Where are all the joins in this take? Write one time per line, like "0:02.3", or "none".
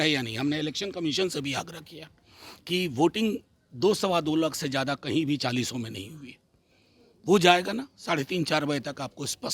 none